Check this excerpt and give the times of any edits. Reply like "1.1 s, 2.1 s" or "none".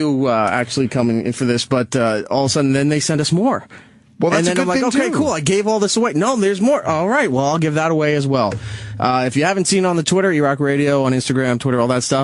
4.8 s